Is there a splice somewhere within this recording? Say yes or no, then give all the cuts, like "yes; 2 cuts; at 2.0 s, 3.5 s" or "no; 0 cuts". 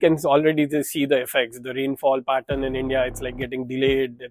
no; 0 cuts